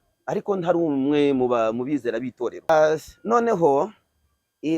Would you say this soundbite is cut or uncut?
cut